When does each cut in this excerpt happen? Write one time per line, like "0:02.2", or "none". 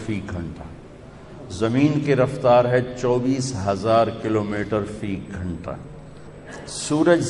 0:06.1